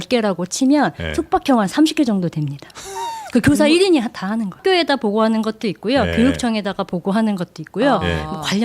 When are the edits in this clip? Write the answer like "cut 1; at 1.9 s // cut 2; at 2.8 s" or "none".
cut 1; at 4.6 s